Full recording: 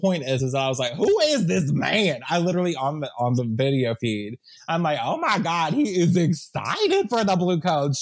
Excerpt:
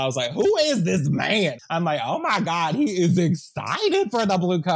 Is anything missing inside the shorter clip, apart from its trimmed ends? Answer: yes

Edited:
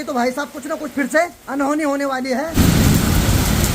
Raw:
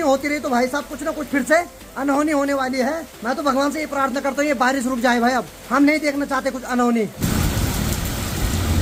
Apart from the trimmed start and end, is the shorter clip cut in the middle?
yes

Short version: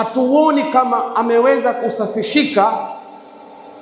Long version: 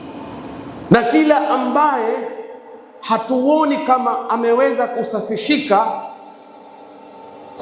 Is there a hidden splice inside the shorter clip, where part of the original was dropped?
no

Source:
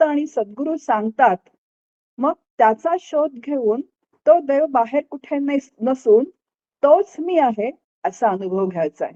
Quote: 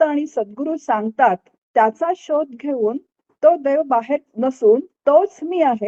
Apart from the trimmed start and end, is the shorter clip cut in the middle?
yes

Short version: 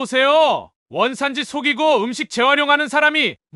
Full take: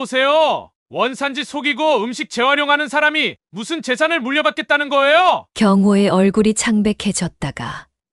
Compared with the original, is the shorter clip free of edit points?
yes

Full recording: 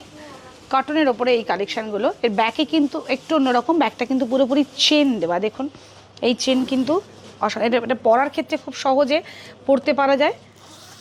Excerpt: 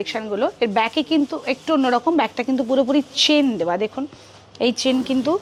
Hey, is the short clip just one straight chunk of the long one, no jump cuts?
yes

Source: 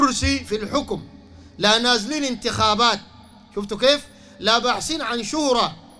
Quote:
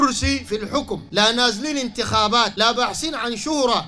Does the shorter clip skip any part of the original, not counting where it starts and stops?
yes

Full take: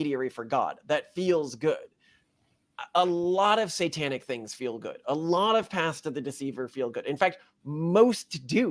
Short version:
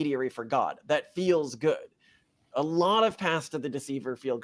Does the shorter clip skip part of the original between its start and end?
yes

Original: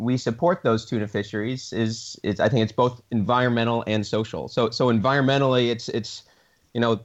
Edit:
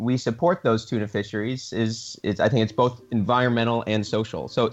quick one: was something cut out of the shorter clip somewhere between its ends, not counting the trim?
no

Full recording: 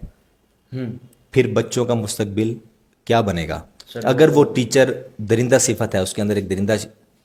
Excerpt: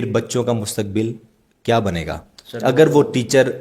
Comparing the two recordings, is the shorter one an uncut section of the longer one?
yes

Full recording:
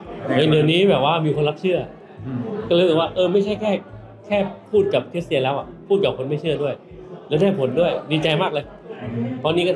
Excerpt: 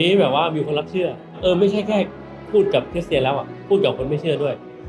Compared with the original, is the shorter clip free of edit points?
no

